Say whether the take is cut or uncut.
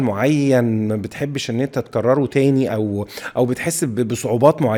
uncut